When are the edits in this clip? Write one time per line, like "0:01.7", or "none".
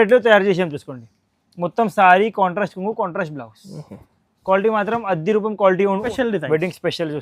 0:06.1